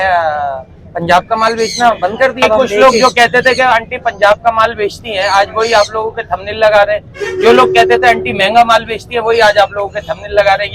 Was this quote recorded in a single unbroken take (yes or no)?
no